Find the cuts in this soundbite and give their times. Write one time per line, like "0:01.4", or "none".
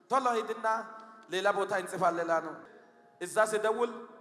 0:02.6